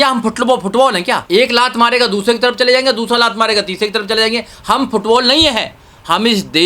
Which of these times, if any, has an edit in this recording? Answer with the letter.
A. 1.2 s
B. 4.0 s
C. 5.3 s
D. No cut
A